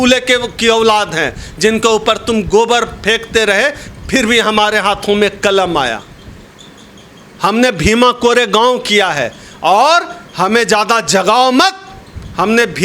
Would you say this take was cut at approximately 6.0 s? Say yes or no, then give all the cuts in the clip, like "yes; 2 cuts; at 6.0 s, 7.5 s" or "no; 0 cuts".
no; 0 cuts